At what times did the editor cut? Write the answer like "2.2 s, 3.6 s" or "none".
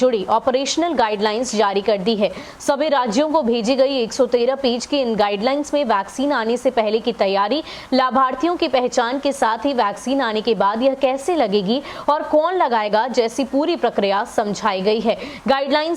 none